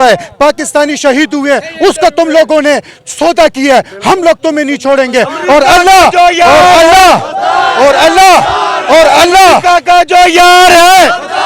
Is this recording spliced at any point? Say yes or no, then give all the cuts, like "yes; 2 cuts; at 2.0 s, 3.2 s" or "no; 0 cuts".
no; 0 cuts